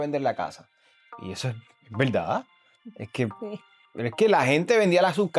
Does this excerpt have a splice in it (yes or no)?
no